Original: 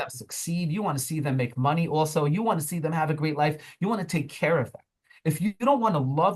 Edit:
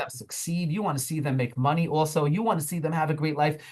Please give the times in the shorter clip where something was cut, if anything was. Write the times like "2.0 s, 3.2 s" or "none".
none

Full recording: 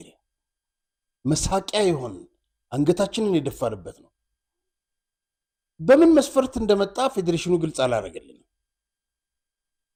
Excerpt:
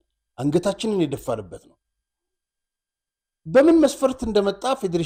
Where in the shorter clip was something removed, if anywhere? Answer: none

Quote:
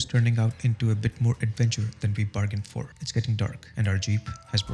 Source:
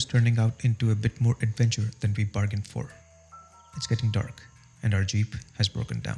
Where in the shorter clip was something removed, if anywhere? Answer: 3.0 s, 3.6 s

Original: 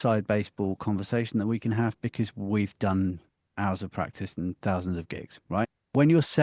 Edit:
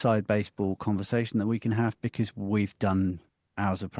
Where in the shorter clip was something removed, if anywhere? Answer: none

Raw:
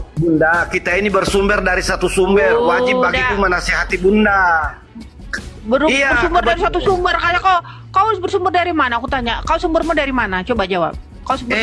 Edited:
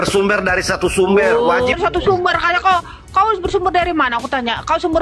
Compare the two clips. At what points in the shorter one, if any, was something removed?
1.7 s

